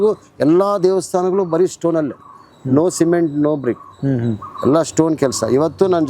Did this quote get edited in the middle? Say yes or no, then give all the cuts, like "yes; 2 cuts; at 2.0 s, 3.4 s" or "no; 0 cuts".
no; 0 cuts